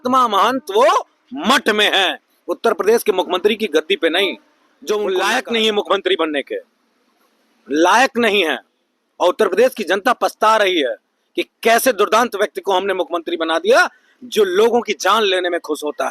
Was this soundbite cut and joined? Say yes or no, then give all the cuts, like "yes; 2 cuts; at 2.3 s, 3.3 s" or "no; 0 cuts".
yes; 1 cut; at 5.1 s